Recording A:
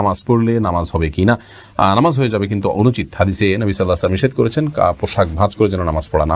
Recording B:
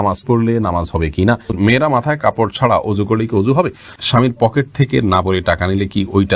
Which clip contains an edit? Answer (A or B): B